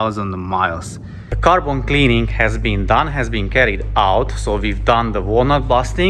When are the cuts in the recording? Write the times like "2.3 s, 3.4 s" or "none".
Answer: 1.3 s